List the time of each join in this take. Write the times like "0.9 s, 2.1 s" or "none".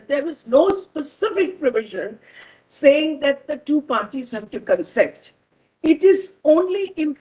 none

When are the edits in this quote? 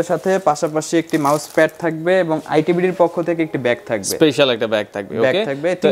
none

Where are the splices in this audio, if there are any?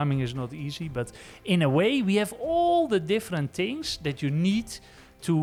none

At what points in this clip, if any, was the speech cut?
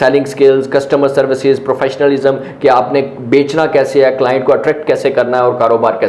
none

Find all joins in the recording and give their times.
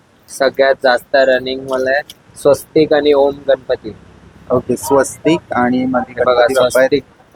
none

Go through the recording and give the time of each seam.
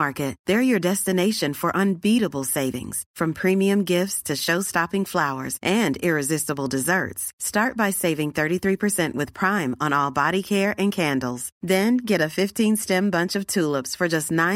none

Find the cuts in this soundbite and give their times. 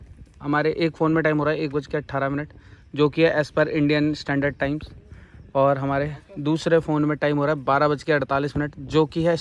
none

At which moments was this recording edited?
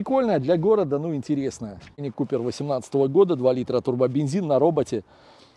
1.9 s

